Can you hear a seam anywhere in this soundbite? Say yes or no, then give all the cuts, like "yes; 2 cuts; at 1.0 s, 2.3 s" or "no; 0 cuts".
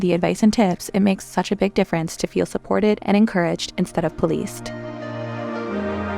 yes; 1 cut; at 4.6 s